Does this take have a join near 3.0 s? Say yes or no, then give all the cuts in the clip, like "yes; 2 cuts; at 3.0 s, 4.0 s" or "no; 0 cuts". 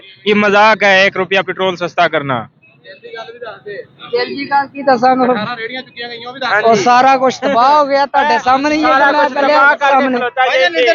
no; 0 cuts